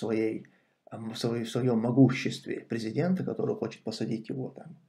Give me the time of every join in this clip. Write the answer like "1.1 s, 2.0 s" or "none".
none